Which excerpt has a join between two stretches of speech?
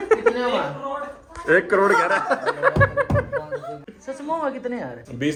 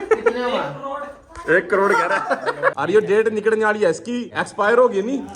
second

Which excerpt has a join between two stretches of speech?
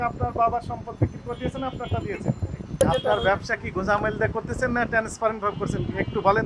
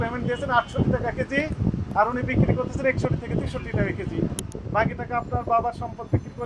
first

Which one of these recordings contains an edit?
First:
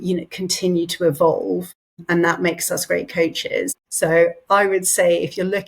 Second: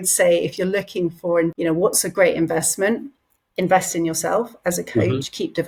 first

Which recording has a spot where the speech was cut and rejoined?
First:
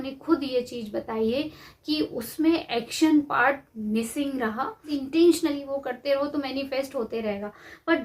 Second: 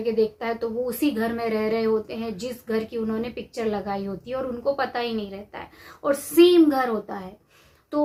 first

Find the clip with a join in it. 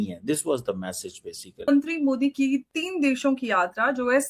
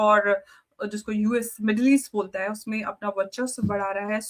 first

